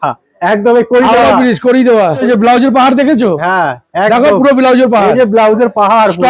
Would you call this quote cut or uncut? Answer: cut